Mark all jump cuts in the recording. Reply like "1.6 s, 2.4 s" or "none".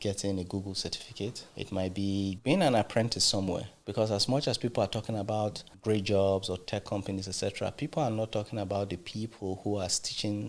1.5 s, 2.4 s, 3.8 s, 5.7 s